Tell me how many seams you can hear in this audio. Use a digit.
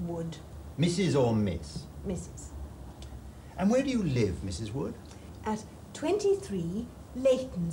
1